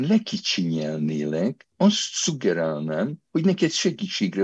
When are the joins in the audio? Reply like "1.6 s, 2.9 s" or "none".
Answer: 1.6 s